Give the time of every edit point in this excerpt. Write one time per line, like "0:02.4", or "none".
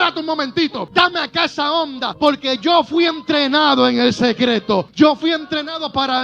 0:00.8
0:02.1
0:04.9